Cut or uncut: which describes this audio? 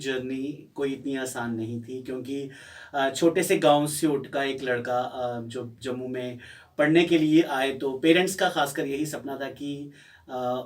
uncut